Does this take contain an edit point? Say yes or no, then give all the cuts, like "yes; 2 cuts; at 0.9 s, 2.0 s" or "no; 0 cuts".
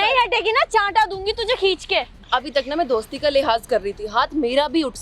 yes; 1 cut; at 2.2 s